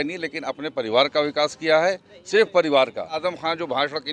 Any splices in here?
yes; 1 cut; at 3.2 s

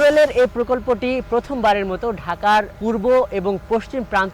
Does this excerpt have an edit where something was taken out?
yes; 1 cut; at 2.7 s

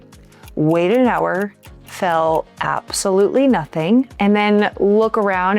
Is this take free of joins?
no; 1 cut; at 4.1 s

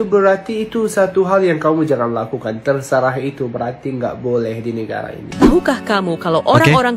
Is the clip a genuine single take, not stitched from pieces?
no; 1 cut; at 5.3 s

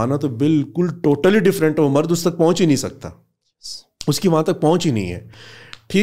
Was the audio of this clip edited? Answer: no; 0 cuts

